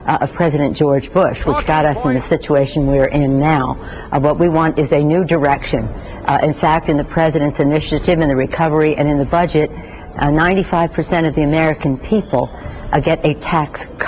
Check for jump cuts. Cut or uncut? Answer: cut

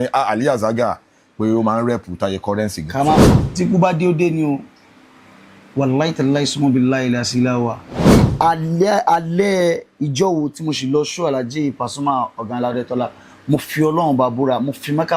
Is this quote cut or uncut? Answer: cut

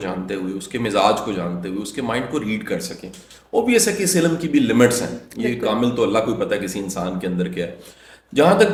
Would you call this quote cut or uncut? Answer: uncut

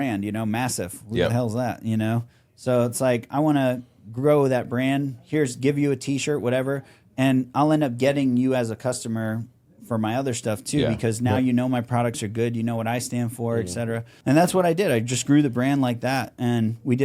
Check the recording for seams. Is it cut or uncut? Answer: cut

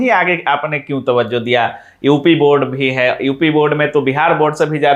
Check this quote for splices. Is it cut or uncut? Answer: uncut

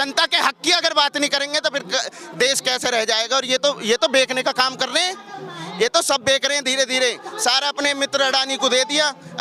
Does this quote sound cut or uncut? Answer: uncut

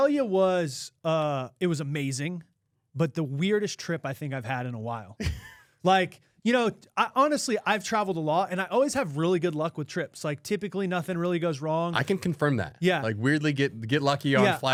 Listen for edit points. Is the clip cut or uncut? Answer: uncut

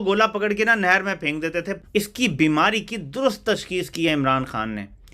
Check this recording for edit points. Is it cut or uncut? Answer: cut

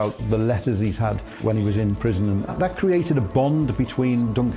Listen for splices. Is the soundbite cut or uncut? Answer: cut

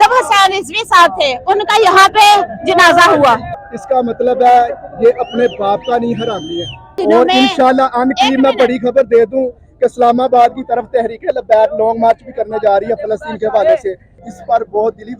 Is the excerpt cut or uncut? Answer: cut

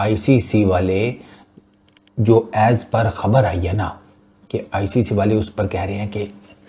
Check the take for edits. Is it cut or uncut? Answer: uncut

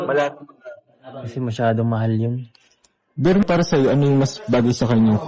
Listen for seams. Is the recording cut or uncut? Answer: cut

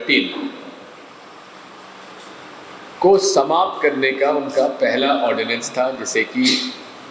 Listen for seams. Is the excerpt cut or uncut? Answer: uncut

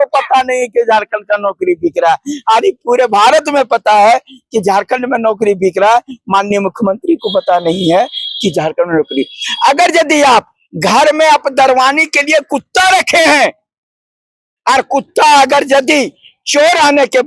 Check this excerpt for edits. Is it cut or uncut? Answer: uncut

